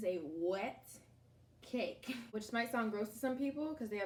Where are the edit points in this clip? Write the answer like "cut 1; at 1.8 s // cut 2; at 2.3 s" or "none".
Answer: none

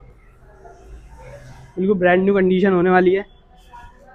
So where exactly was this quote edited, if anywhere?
none

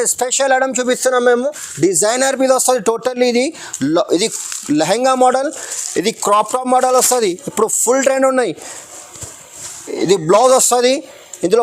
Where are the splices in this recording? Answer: none

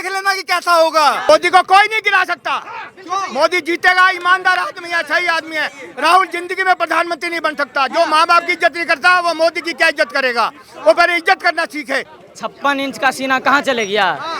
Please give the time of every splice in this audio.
cut 1; at 1.3 s // cut 2; at 12.1 s

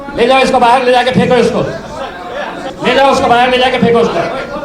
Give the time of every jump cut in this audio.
cut 1; at 2.6 s

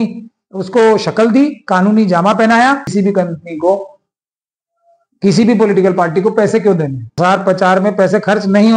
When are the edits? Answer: cut 1; at 2.9 s // cut 2; at 7.2 s

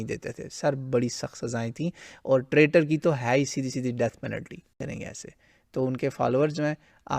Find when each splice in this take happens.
cut 1; at 4.8 s

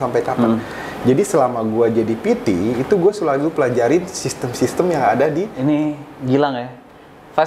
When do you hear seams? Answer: cut 1; at 5.5 s

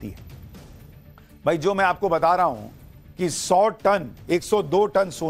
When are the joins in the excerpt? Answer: none

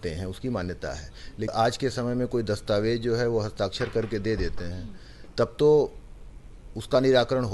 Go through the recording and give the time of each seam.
cut 1; at 1.5 s

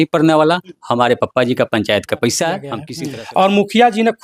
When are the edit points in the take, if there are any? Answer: cut 1; at 2.8 s

